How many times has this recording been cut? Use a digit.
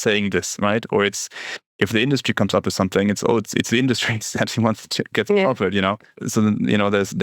2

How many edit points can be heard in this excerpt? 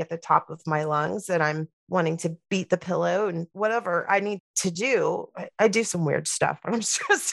2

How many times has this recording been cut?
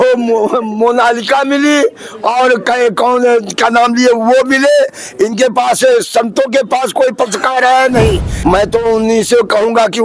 1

